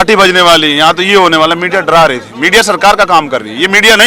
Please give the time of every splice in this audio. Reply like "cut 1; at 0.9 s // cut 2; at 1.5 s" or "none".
none